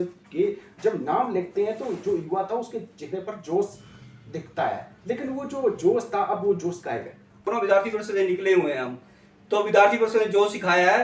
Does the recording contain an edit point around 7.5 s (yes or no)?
yes